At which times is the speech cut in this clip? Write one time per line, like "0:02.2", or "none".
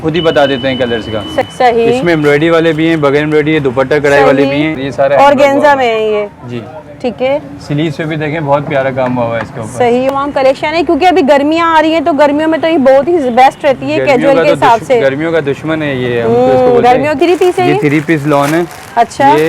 0:01.4
0:04.8
0:10.1
0:17.2